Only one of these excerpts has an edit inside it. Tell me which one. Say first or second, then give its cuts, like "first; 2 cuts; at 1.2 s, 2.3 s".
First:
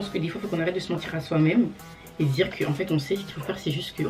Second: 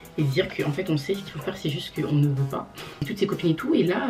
second; 1 cut; at 3.1 s